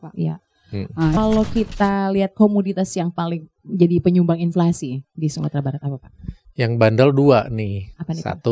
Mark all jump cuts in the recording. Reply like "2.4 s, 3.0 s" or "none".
1.2 s